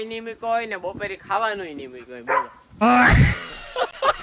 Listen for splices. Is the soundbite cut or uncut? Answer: uncut